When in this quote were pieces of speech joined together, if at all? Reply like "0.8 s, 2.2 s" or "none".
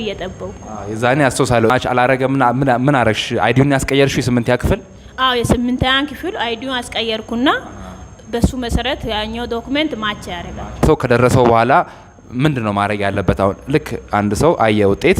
1.7 s, 10.8 s